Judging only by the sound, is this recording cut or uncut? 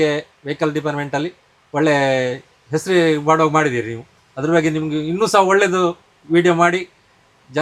uncut